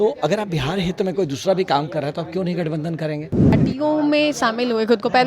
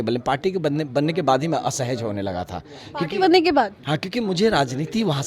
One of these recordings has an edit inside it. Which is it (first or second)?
first